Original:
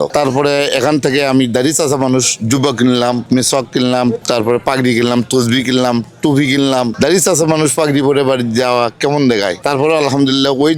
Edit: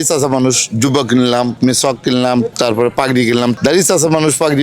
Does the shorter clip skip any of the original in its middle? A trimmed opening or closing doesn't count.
yes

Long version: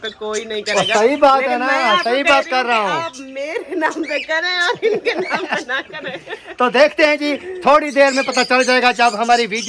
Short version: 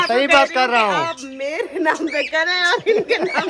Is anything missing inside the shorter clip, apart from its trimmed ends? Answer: no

